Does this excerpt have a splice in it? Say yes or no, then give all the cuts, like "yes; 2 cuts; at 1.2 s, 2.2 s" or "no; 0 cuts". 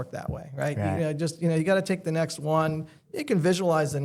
no; 0 cuts